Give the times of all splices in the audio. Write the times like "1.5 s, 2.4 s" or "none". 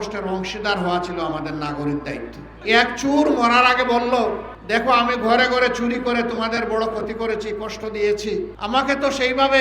2.6 s, 4.5 s, 8.5 s